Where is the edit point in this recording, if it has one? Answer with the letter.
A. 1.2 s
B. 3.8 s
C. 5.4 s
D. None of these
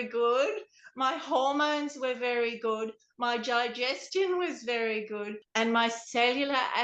C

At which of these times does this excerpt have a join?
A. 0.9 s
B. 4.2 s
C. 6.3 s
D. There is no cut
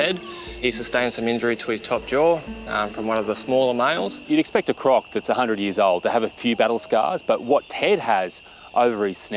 B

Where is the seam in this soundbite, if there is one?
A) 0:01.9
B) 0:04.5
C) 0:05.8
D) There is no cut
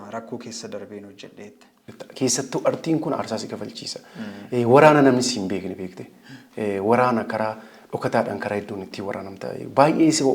A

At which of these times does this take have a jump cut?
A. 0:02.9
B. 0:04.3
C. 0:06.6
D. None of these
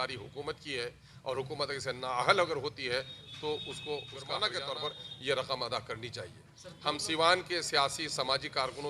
B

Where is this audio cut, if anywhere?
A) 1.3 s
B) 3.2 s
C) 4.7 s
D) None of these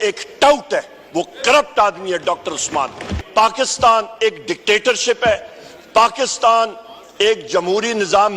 B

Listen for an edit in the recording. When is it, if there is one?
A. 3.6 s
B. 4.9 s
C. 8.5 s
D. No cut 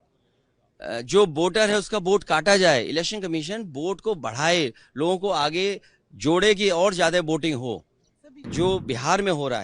C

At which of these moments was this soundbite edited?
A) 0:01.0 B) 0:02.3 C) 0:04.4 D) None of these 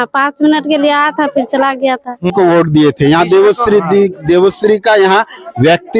B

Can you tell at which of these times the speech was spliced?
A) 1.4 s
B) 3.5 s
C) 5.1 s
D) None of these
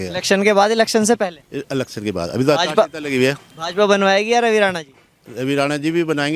D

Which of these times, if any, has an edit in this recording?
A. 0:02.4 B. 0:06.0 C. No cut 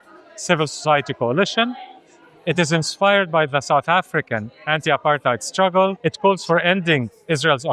B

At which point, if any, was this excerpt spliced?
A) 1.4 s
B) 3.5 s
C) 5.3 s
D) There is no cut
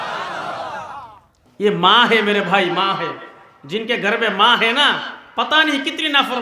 A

